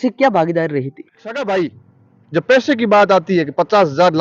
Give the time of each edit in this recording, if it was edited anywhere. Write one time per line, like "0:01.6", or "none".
0:01.3

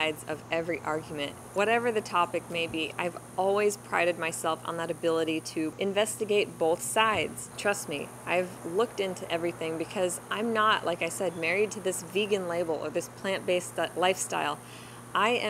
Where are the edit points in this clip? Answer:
0:01.4
0:05.8
0:07.4

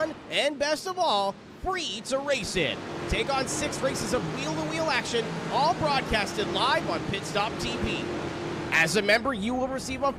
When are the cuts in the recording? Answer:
none

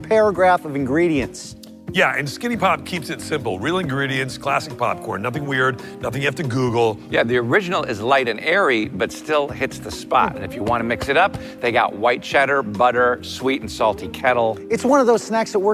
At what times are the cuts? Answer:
none

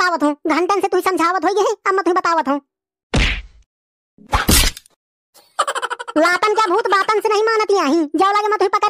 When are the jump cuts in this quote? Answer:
none

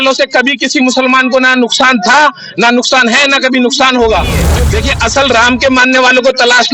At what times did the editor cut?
0:04.5

